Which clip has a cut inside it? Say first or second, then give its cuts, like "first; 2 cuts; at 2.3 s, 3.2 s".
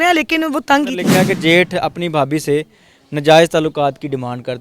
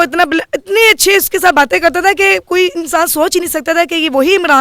first; 1 cut; at 1.1 s